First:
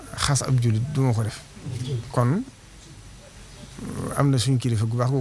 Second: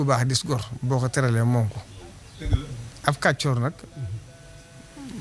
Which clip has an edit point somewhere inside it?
first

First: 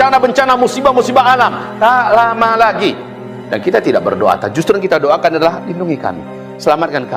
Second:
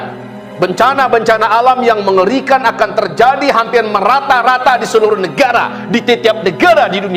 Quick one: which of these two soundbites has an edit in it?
first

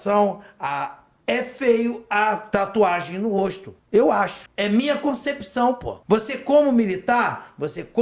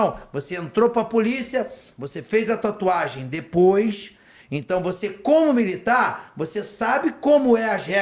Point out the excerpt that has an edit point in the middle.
first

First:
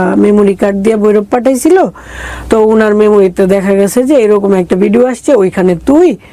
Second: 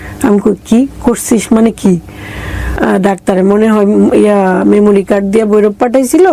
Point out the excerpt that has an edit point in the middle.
second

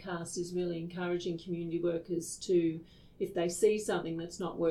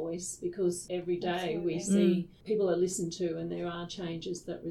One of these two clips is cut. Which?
second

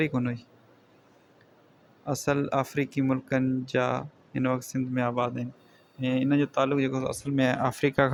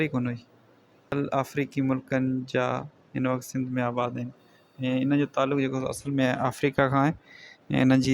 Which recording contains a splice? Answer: second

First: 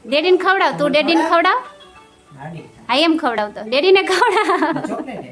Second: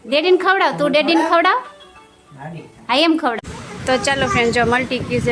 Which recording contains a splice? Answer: second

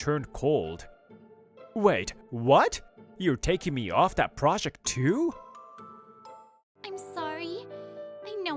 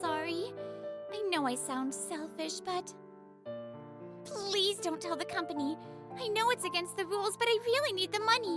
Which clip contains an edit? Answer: first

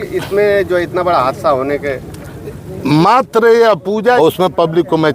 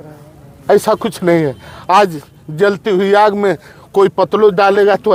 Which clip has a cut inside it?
first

